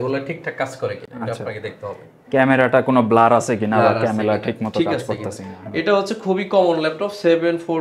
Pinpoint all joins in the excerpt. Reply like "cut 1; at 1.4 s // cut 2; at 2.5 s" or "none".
none